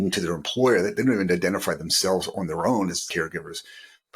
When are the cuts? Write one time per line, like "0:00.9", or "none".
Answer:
0:03.0

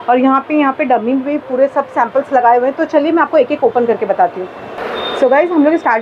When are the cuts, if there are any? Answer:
none

